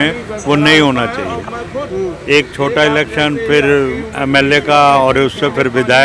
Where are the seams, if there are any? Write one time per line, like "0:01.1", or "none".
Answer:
none